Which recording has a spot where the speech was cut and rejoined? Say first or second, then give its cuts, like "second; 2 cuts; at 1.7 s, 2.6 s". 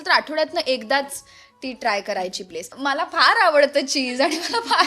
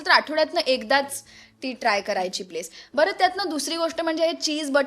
first; 1 cut; at 2.7 s